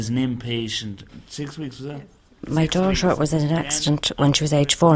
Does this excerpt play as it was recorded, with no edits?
no; 2 cuts; at 1.1 s, 2.5 s

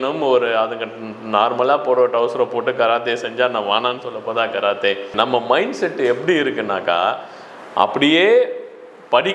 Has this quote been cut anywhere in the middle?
yes; 1 cut; at 5.1 s

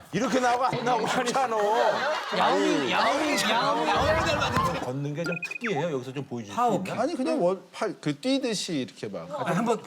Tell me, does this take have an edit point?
yes; 1 cut; at 4.8 s

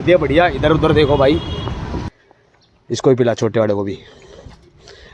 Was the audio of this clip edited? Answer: yes; 1 cut; at 2.1 s

